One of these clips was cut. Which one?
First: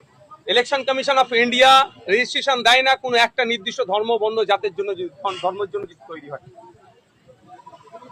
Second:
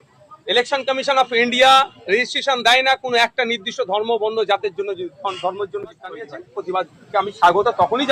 second; 1 cut; at 6.5 s

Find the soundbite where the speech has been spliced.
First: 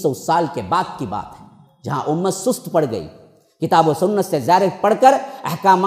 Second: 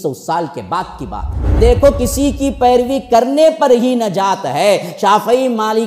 second; 1 cut; at 1.6 s

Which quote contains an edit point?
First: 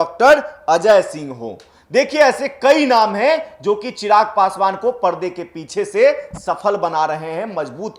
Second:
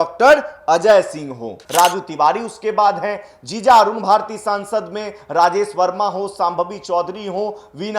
second; 1 cut; at 1.6 s

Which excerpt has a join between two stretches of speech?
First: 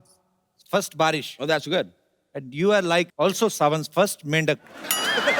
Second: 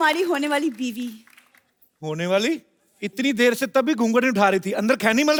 first; 1 cut; at 3.1 s

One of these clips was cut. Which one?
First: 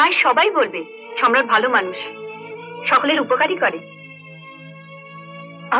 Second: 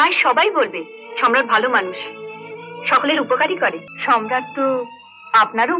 second; 1 cut; at 3.9 s

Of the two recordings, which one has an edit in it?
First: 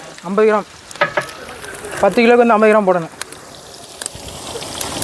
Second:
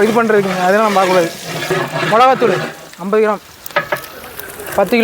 second; 1 cut; at 1.7 s

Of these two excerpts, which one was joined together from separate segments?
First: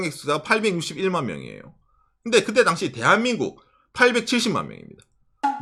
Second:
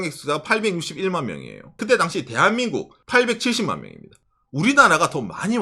second; 3 cuts; at 1.8 s, 3.0 s, 4.5 s

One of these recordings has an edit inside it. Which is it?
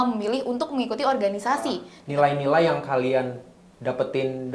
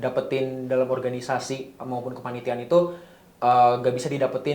first; 1 cut; at 1.9 s

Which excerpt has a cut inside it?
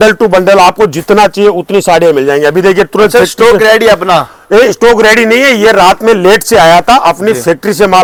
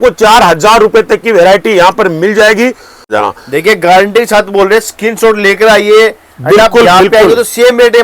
second; 1 cut; at 3.1 s

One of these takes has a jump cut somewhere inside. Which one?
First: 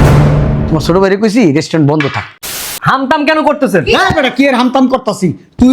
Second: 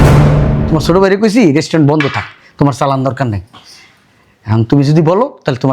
first; 1 cut; at 2.5 s

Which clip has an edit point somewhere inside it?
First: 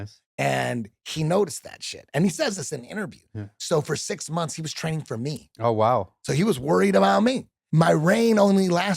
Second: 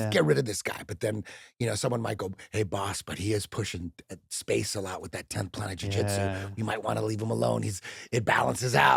first; 1 cut; at 7.6 s

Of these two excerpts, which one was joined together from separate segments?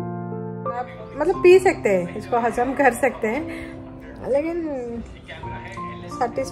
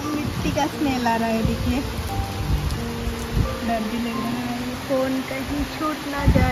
first; 1 cut; at 1.0 s

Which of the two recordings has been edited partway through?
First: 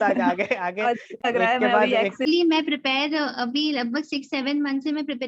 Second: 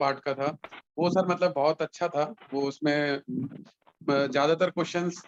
first; 1 cut; at 2.2 s

